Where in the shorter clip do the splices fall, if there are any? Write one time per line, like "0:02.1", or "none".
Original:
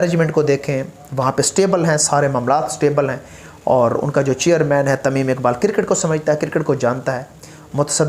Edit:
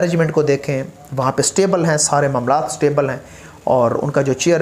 none